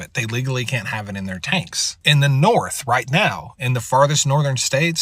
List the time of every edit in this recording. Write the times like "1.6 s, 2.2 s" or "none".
1.9 s